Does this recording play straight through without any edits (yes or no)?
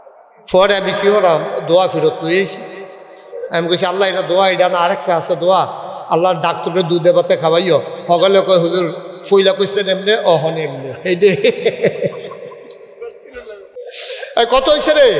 yes